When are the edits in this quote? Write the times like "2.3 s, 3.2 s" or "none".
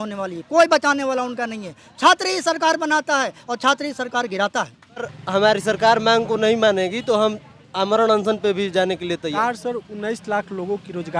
5.2 s, 9.3 s